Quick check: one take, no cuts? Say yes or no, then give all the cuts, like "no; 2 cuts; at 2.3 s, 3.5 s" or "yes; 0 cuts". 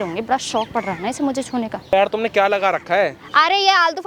no; 1 cut; at 1.9 s